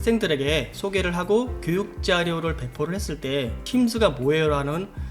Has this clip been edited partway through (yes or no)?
yes